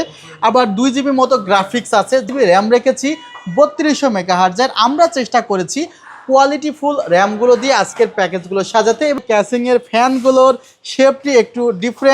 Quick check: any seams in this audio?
yes; 2 cuts; at 2.2 s, 9.2 s

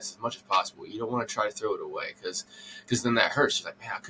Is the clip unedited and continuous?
yes; 0 cuts

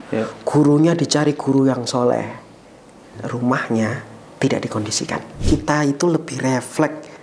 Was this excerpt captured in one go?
no; 1 cut; at 5.4 s

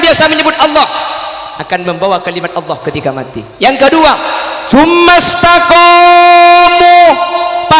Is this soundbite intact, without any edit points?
yes; 0 cuts

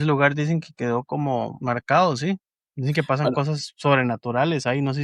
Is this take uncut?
no; 1 cut; at 1.6 s

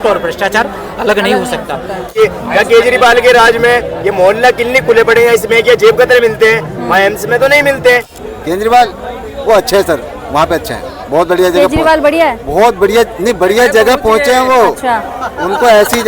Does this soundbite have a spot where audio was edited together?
yes; 2 cuts; at 2.1 s, 8.1 s

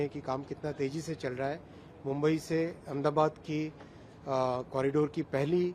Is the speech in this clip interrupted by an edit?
no; 0 cuts

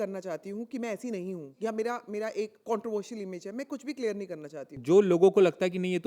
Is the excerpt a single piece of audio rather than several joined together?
no; 3 cuts; at 1.5 s, 2.6 s, 4.7 s

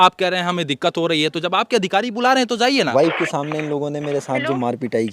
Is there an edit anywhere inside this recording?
yes; 1 cut; at 2.9 s

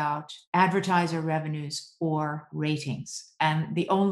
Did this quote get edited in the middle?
no; 0 cuts

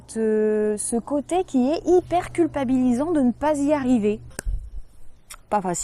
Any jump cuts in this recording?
no; 0 cuts

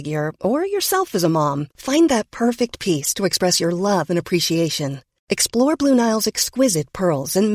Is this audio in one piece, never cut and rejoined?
yes; 0 cuts

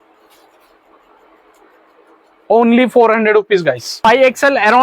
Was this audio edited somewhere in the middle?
yes; 1 cut; at 3.9 s

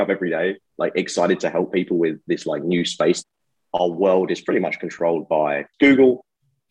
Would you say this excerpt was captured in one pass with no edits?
no; 2 cuts; at 3.2 s, 5.7 s

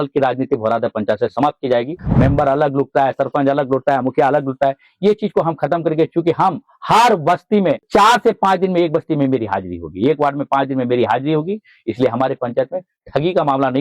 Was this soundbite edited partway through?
yes; 2 cuts; at 2.0 s, 7.8 s

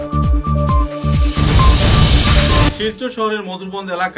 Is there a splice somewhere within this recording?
yes; 1 cut; at 2.7 s

